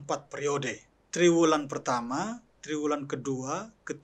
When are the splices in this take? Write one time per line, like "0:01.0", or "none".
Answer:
0:00.9